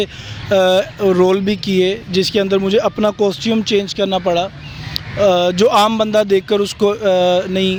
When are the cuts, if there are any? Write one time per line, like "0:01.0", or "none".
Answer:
none